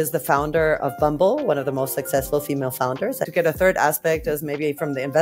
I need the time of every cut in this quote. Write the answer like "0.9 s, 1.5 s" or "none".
3.3 s

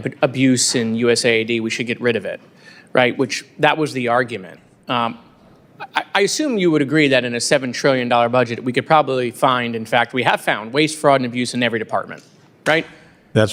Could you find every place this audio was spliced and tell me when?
none

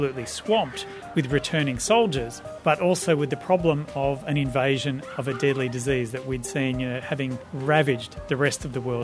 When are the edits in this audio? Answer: 7.5 s

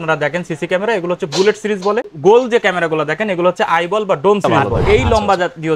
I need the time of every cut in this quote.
4.4 s

